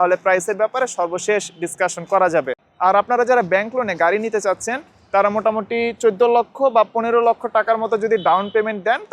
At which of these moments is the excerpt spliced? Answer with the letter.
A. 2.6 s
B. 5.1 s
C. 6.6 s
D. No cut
A